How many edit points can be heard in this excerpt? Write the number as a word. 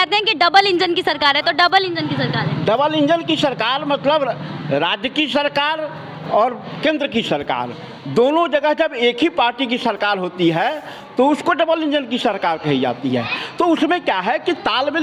zero